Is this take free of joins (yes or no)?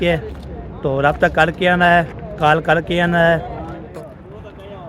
no